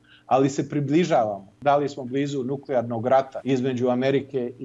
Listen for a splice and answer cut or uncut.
cut